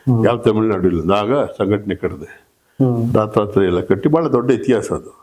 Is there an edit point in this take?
no; 0 cuts

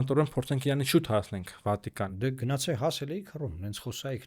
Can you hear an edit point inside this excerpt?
yes; 1 cut; at 2.1 s

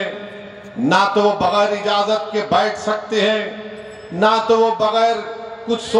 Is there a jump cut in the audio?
no; 0 cuts

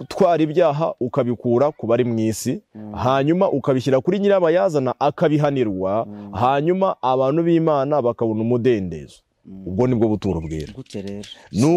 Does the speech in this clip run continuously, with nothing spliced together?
yes; 0 cuts

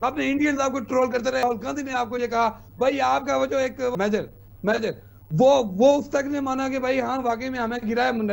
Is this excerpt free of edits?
no; 2 cuts; at 1.4 s, 3.9 s

